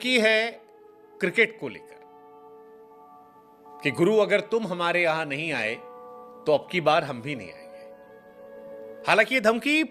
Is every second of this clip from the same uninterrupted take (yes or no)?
yes